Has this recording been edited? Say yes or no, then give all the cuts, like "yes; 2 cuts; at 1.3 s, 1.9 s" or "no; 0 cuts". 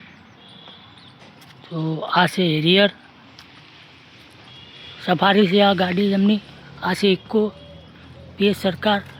no; 0 cuts